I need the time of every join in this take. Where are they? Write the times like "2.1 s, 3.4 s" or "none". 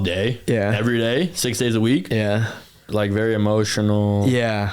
2.8 s